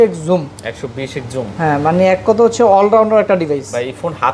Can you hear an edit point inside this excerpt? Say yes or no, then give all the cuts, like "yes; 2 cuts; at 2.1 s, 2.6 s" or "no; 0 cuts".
no; 0 cuts